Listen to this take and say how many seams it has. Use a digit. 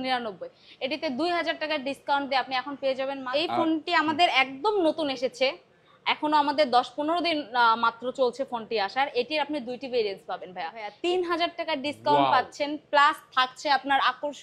2